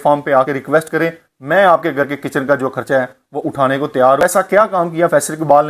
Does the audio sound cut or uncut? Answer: cut